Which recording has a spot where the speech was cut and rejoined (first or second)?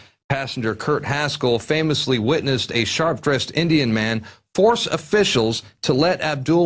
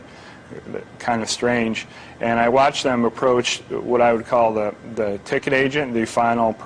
second